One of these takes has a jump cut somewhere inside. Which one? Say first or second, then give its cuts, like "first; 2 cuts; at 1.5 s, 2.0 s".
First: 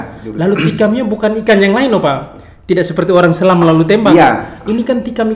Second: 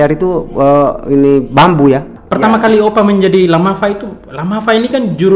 second; 1 cut; at 2.1 s